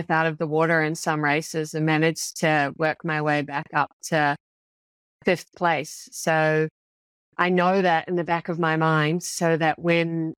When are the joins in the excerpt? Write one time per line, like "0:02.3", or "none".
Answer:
none